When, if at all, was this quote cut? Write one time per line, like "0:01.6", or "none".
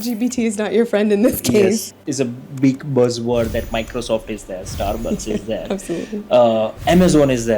0:02.0